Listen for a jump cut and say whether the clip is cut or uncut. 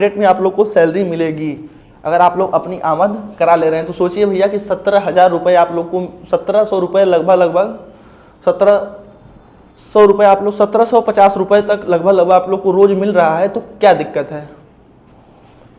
uncut